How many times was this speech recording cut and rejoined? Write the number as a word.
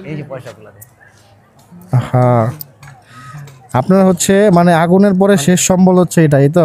zero